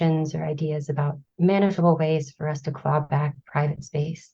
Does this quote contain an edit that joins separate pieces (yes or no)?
yes